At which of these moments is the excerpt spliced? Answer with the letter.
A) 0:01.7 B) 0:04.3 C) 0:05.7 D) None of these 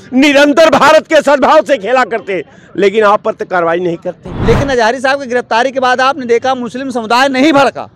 B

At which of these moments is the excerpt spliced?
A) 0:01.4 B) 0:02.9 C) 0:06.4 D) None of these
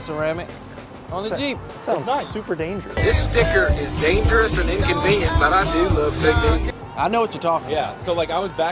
B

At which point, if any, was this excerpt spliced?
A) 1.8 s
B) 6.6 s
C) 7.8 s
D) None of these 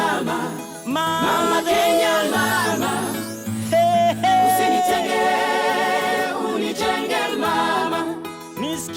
D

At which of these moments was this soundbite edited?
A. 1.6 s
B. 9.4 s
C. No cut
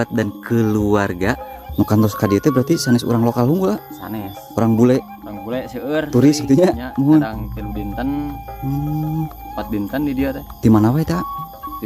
A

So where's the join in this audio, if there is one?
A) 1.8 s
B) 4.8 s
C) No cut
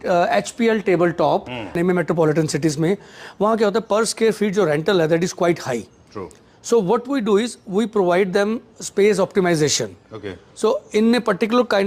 A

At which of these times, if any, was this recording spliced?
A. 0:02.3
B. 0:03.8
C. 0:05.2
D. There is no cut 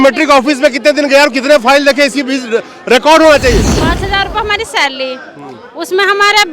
B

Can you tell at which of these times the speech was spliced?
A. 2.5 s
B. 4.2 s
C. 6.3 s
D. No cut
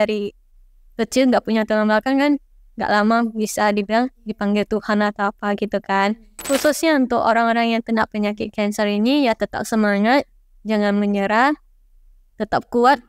C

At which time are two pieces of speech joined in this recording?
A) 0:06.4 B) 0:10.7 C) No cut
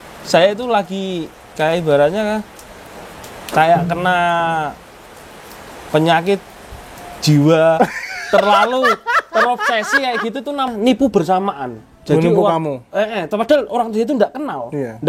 B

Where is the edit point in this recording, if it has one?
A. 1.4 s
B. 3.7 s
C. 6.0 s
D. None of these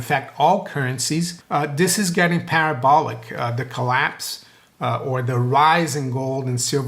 A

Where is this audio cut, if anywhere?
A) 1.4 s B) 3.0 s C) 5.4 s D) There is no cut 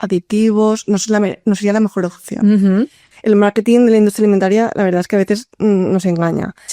B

